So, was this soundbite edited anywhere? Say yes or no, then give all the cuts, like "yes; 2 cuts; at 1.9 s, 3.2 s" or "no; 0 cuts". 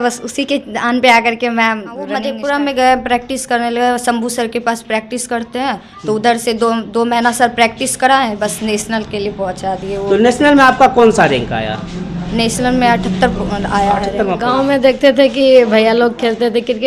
yes; 2 cuts; at 2.2 s, 14.4 s